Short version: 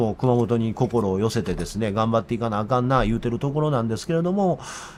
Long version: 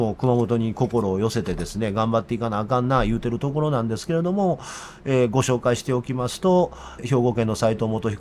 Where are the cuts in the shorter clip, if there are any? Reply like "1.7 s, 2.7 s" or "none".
none